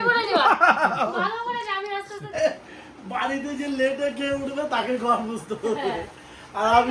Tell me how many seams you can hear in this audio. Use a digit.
1